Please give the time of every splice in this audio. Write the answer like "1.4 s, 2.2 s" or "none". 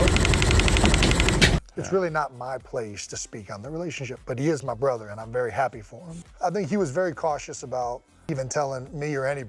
1.6 s, 6.2 s